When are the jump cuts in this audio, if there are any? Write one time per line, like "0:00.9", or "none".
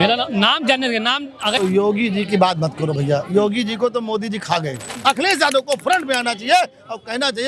0:01.6
0:04.9